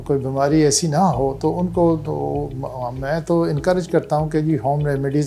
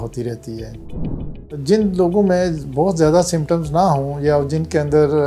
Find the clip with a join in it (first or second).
second